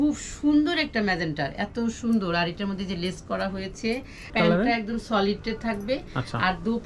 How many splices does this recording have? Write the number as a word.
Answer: one